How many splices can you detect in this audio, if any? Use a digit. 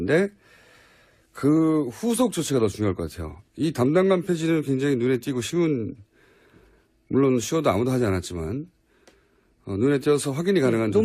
1